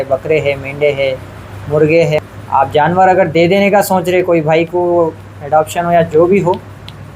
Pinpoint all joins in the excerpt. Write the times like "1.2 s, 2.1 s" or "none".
2.3 s